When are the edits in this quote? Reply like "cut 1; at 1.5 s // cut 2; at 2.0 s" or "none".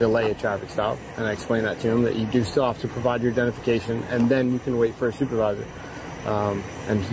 none